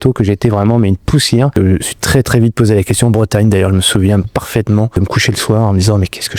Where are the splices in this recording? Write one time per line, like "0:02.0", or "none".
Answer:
0:01.6
0:05.0

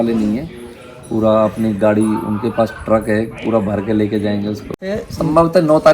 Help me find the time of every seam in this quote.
0:04.8

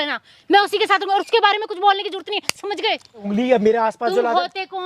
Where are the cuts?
0:03.2

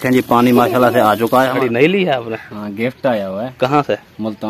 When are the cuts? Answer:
0:01.6

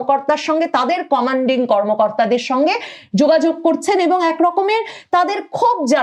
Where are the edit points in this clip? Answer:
none

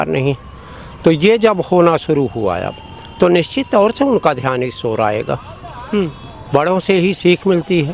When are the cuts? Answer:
none

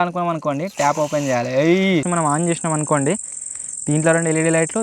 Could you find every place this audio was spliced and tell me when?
0:02.1

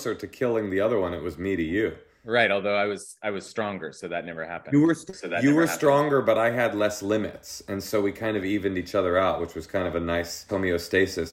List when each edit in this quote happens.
0:10.4

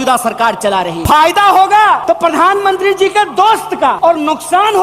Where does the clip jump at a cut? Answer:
0:01.0
0:02.0
0:04.0

